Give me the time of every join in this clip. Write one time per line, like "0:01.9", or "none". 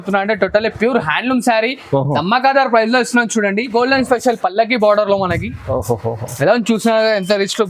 0:03.7